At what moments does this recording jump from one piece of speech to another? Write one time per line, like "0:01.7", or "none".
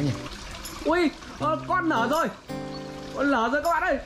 none